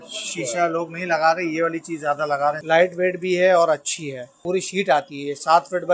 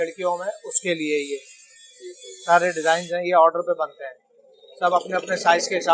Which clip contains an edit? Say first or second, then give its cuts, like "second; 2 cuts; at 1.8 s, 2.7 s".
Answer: first; 2 cuts; at 2.6 s, 4.3 s